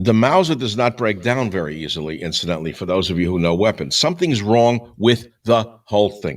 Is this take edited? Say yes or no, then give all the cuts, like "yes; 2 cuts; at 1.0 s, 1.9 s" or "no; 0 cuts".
yes; 1 cut; at 2.3 s